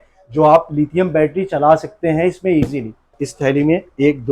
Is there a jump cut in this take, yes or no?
yes